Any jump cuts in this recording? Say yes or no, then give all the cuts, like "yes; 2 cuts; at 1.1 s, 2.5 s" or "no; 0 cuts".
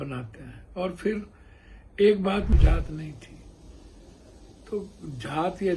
yes; 1 cut; at 2.5 s